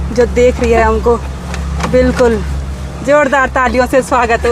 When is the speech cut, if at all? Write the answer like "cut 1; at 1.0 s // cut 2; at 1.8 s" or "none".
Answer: none

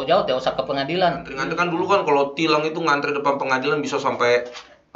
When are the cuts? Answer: cut 1; at 1.4 s

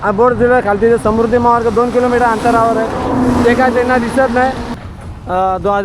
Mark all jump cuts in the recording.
cut 1; at 4.7 s

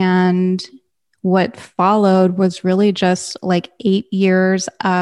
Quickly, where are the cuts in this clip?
none

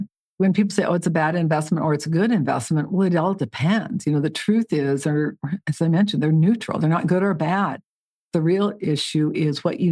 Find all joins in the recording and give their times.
none

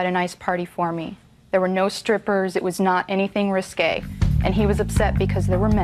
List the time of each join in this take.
none

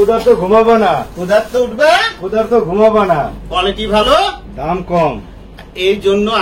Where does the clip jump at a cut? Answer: cut 1; at 3.4 s

